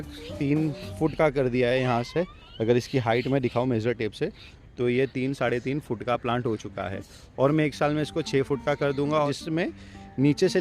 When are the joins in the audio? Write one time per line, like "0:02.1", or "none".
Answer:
0:09.3